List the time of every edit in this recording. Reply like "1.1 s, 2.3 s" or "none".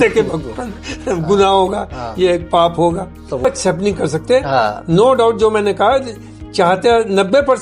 3.4 s